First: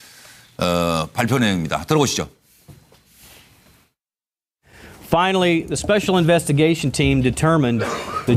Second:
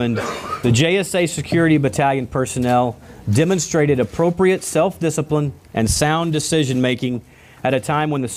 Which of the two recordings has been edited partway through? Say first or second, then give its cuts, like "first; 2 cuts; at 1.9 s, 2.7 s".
first; 1 cut; at 2.9 s